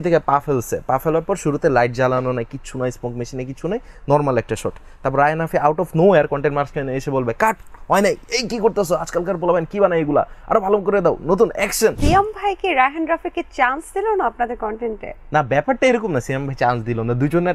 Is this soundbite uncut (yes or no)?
no